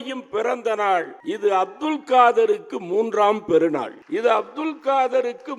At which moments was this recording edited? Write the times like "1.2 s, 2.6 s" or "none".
1.2 s, 4.0 s